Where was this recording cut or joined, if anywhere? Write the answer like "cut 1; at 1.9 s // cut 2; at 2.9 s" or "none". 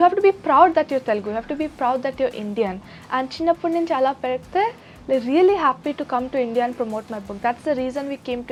none